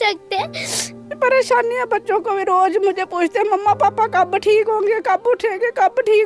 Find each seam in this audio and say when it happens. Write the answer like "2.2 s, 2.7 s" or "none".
1.0 s